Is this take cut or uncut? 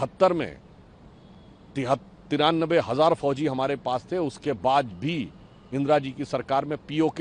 uncut